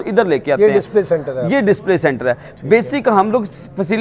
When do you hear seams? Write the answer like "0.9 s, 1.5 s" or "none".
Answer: none